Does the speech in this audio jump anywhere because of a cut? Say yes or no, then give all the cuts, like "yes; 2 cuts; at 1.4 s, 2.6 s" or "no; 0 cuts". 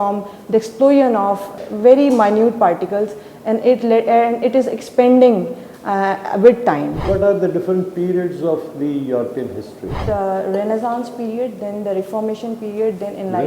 yes; 3 cuts; at 1.6 s, 7.0 s, 9.9 s